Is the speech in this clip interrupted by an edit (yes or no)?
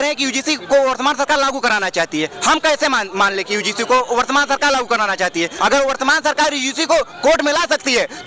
yes